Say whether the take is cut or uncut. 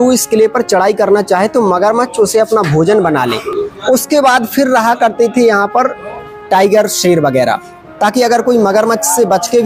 uncut